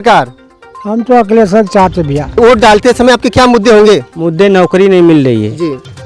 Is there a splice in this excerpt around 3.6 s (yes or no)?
no